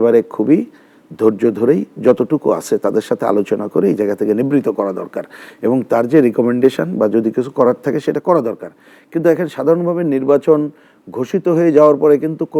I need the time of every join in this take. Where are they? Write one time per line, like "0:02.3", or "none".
none